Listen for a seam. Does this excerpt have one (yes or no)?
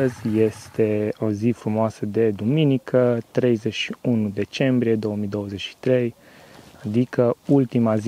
no